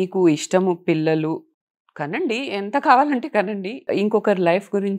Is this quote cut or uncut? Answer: cut